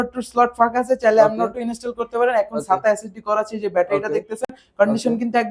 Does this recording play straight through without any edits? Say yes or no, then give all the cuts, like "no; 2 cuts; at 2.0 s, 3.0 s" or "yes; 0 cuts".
yes; 0 cuts